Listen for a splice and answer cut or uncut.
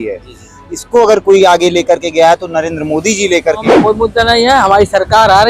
cut